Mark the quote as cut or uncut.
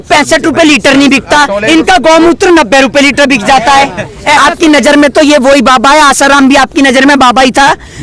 cut